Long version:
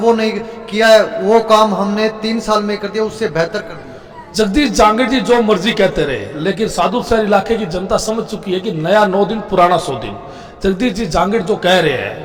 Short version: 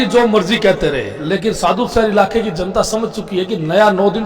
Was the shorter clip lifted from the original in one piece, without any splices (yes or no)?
yes